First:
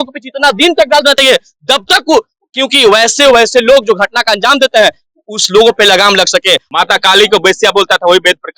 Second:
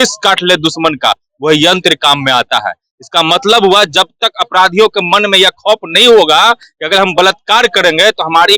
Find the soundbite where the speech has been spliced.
first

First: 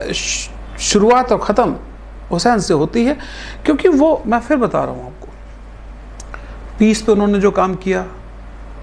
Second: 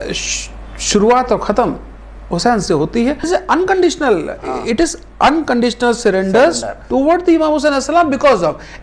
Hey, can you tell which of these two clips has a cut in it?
second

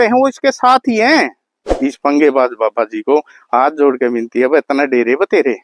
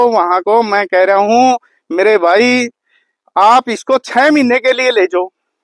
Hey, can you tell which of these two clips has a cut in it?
first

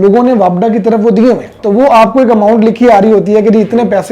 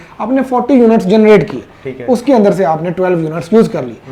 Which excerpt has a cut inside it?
first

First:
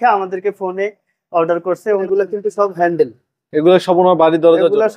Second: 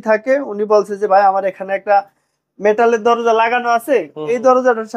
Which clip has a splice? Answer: first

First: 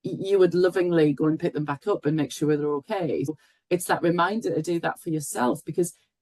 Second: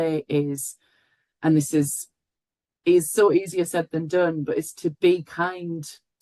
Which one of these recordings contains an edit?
first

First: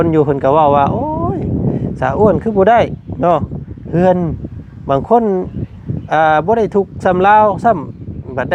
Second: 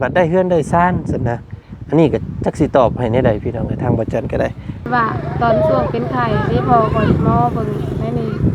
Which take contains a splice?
second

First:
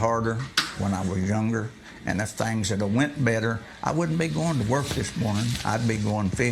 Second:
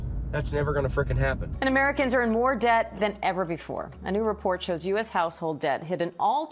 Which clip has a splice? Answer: second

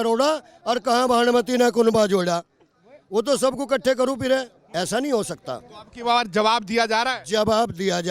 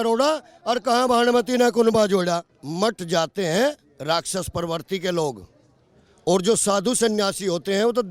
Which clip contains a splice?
second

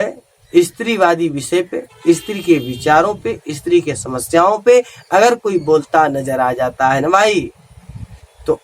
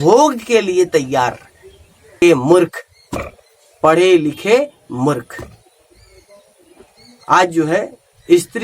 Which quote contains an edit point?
second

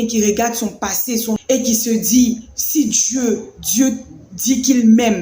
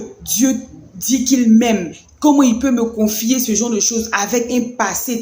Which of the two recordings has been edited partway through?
first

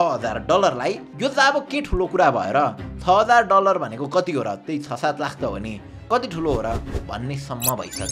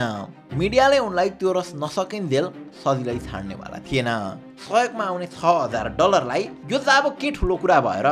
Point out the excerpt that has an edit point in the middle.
second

